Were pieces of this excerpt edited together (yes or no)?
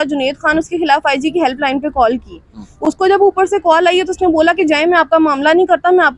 no